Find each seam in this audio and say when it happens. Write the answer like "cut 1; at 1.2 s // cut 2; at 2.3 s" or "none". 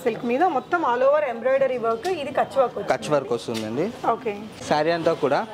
cut 1; at 4.6 s